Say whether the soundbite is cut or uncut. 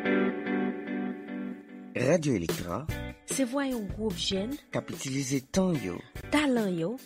cut